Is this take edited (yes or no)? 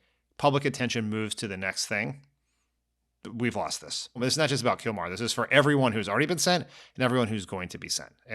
yes